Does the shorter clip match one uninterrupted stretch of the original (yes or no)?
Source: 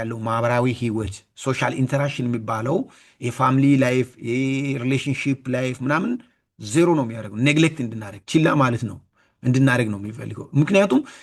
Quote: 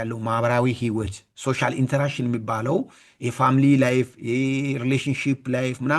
yes